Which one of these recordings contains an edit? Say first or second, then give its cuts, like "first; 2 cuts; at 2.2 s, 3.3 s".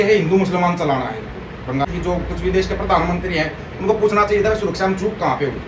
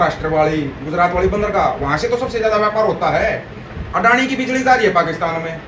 first; 1 cut; at 1.9 s